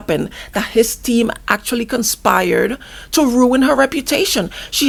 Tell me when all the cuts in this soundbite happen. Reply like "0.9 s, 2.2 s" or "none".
none